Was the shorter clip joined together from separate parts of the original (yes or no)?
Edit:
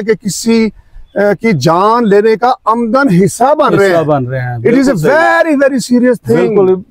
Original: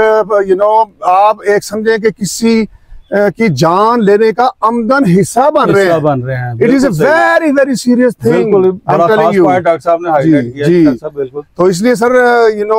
no